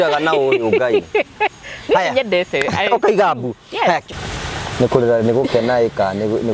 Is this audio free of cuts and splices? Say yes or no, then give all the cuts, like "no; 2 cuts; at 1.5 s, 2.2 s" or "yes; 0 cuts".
no; 1 cut; at 4.2 s